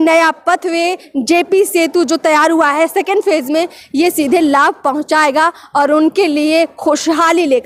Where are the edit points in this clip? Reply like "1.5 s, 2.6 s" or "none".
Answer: none